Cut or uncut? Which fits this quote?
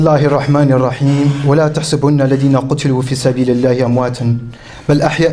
cut